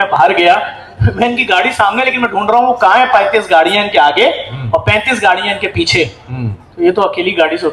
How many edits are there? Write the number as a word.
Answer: zero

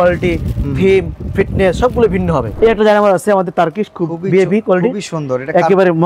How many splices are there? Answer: one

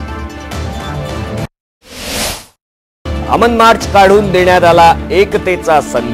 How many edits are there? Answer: zero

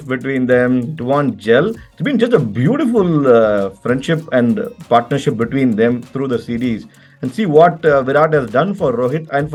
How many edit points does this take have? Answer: zero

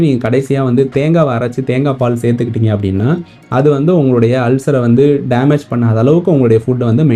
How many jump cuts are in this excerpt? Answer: zero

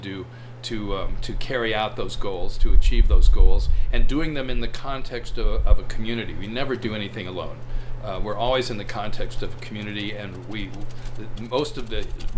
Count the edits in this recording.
zero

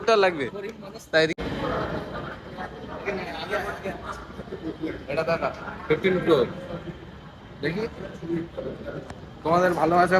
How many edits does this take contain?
one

